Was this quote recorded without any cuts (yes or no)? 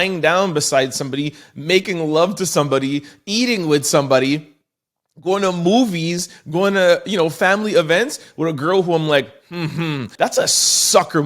no